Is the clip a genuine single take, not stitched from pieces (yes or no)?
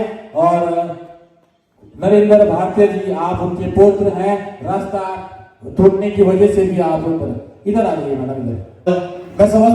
no